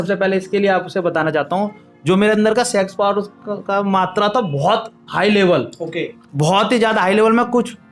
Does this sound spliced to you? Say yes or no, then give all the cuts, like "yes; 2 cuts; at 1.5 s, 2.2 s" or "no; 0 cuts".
no; 0 cuts